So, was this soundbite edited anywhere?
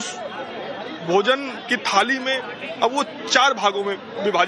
yes; 1 cut; at 3.2 s

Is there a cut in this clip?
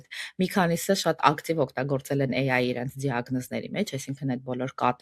no; 0 cuts

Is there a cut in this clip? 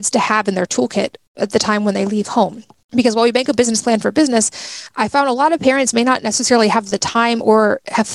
no; 0 cuts

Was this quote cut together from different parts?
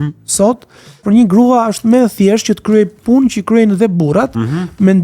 yes; 1 cut; at 1.0 s

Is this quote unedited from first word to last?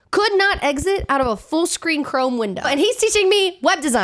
no; 1 cut; at 2.7 s

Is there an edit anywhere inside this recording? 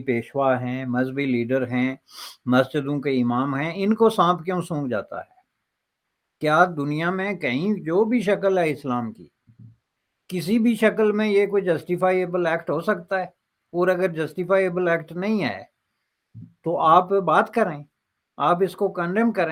no; 0 cuts

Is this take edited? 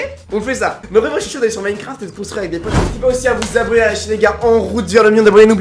yes; 1 cut; at 2.7 s

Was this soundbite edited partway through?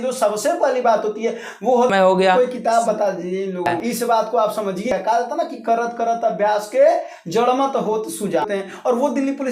yes; 4 cuts; at 1.9 s, 3.8 s, 4.9 s, 8.5 s

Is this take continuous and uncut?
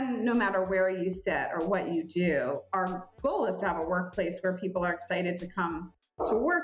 yes; 0 cuts

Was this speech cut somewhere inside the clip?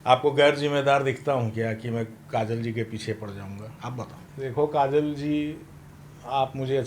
yes; 1 cut; at 4.3 s

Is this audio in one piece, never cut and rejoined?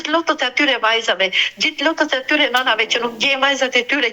yes; 0 cuts

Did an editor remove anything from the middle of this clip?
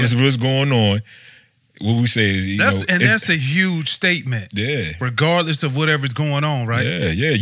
no; 0 cuts

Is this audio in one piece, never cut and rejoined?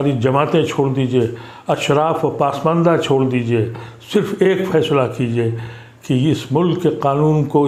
yes; 0 cuts

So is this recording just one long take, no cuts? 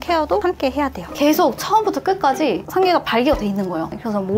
no; 1 cut; at 1.1 s

